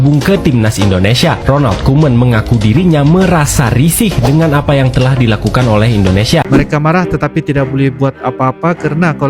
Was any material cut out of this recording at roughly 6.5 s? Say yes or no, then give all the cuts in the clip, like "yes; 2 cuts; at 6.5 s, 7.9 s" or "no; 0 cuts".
yes; 1 cut; at 6.5 s